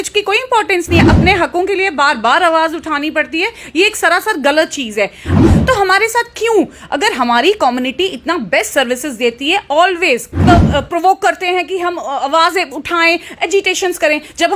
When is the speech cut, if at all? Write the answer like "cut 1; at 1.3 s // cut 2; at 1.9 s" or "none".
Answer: cut 1; at 1.0 s // cut 2; at 5.4 s // cut 3; at 10.4 s